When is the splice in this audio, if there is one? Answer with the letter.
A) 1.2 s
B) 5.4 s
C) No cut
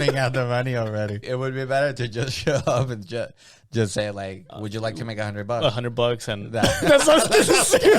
A